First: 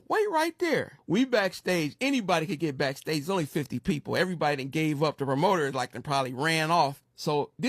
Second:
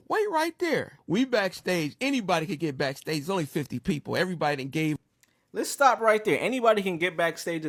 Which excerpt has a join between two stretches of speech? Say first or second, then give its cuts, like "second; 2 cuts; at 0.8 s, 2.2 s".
first; 1 cut; at 5.0 s